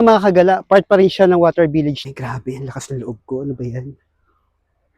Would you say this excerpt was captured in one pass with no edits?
no; 1 cut; at 2.0 s

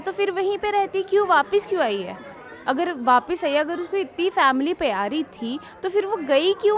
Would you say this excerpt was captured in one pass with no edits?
yes; 0 cuts

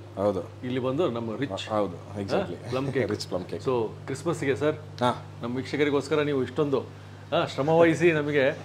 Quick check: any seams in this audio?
no; 0 cuts

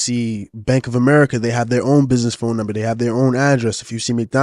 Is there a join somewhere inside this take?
no; 0 cuts

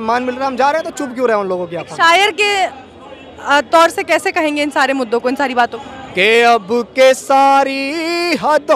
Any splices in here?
yes; 1 cut; at 5.8 s

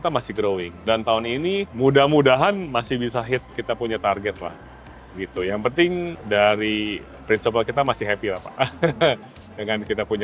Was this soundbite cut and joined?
no; 0 cuts

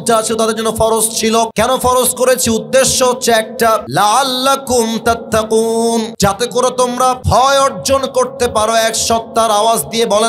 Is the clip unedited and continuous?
no; 4 cuts; at 1.5 s, 3.9 s, 6.1 s, 7.2 s

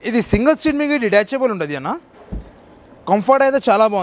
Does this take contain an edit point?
no; 0 cuts

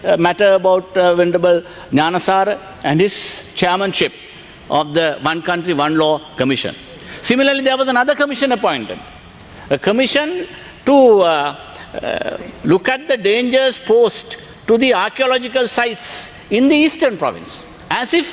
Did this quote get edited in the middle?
no; 0 cuts

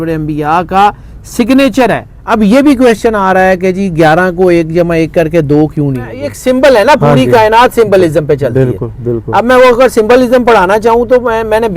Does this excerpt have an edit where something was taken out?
yes; 2 cuts; at 2.1 s, 6.3 s

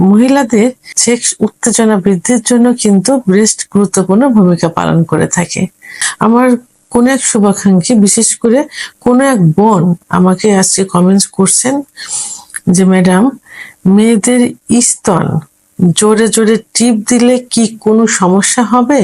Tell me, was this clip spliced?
yes; 2 cuts; at 0.9 s, 6.0 s

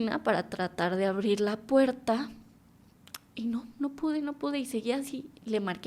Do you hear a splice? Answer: no; 0 cuts

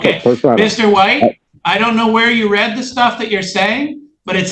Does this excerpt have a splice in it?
yes; 1 cut; at 1.5 s

